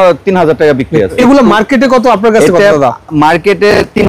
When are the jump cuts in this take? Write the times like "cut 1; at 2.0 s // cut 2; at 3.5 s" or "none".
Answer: cut 1; at 1.1 s